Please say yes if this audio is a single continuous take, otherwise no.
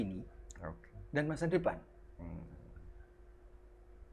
yes